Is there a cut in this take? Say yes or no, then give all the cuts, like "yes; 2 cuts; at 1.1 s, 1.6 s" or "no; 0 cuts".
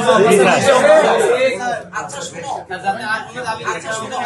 no; 0 cuts